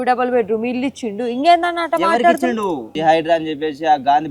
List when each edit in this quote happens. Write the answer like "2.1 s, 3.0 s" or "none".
2.9 s